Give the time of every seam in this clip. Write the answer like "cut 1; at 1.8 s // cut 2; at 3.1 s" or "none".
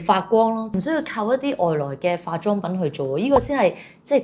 none